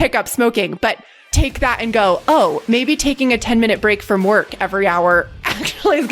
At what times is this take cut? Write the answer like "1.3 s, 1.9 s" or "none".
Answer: 1.3 s